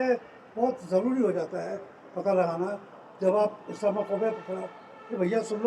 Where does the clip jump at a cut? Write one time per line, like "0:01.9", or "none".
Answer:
none